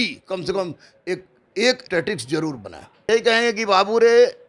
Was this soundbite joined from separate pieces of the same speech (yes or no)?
yes